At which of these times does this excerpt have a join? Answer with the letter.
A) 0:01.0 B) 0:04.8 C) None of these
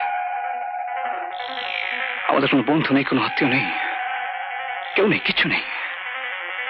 C